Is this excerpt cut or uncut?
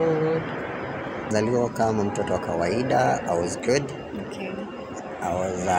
cut